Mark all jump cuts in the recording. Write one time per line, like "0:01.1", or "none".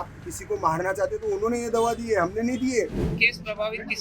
0:03.0